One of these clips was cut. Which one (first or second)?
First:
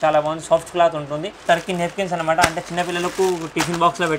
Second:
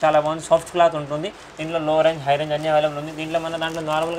first